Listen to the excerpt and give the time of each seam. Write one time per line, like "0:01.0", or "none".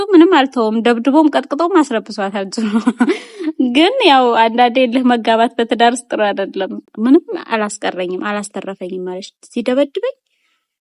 0:06.8